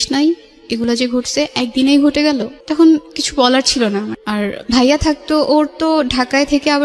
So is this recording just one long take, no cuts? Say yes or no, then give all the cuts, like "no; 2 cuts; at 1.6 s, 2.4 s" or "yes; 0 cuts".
no; 2 cuts; at 2.6 s, 4.1 s